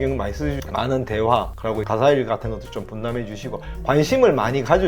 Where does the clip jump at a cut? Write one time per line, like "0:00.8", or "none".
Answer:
0:01.8